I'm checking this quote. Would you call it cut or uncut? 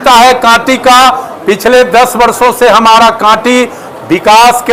uncut